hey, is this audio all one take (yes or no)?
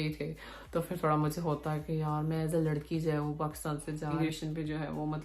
no